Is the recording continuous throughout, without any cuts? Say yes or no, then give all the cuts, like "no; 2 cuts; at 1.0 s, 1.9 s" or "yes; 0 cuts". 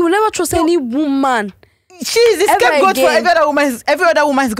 yes; 0 cuts